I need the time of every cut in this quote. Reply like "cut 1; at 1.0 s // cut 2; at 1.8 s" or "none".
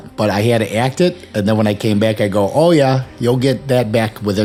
none